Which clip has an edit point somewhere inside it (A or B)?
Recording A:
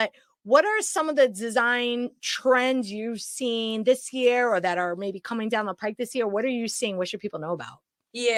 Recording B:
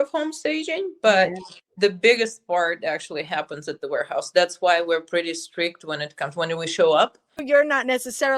B